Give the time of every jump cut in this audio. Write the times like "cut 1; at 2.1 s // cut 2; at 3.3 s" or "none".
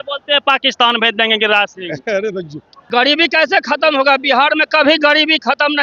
cut 1; at 2.7 s

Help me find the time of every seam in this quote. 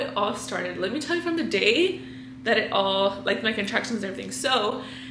none

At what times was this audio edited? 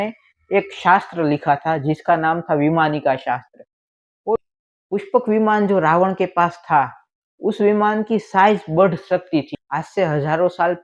cut 1; at 4.4 s // cut 2; at 9.5 s

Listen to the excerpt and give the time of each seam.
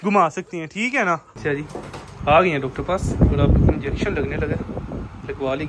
cut 1; at 1.4 s

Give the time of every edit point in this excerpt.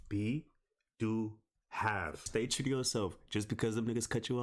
cut 1; at 2.2 s

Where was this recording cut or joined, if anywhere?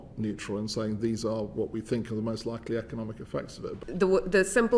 cut 1; at 3.7 s

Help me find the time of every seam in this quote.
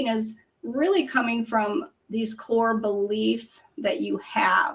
none

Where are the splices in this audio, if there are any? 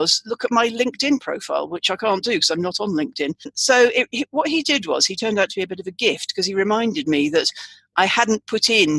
cut 1; at 3.6 s

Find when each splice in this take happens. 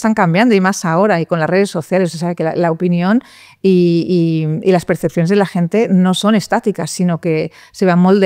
none

